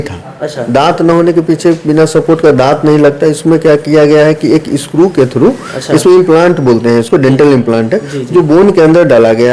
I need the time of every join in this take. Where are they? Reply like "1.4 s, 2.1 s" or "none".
none